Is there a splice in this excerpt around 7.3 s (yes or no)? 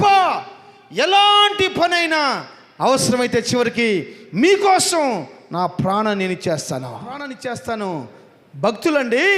yes